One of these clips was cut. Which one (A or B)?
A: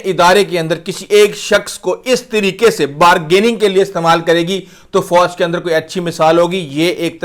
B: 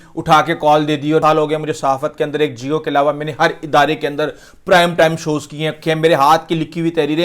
B